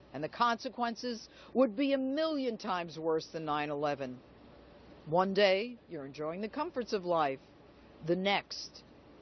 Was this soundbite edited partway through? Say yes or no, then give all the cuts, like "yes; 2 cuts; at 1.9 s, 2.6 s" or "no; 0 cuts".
no; 0 cuts